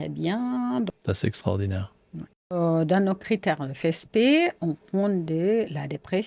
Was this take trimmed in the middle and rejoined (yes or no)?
yes